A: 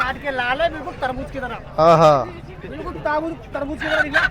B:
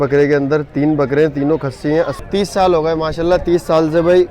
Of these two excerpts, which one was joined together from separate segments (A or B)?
B